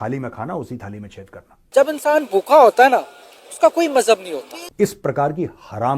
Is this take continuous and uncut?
no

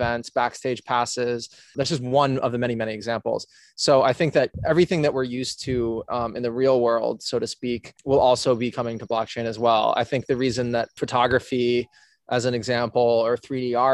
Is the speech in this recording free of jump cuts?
no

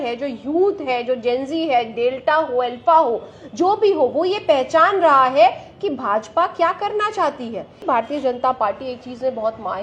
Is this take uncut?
no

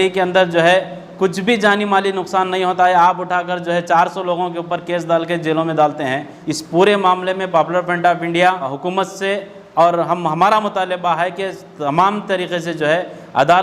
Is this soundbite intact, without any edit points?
no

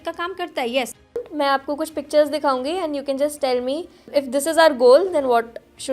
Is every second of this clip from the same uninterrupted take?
no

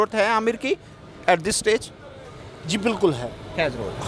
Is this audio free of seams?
yes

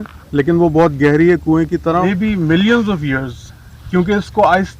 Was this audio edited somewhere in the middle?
yes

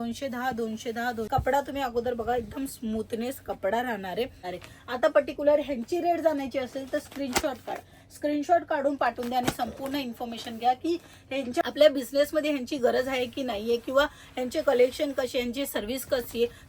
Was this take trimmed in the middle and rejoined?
yes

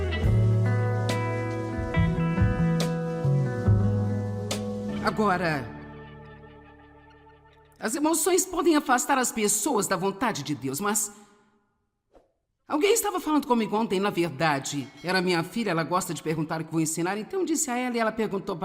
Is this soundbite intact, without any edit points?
no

